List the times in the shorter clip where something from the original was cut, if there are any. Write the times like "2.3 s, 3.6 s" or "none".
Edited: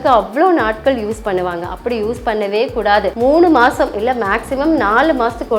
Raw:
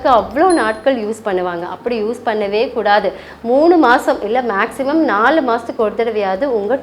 3.1 s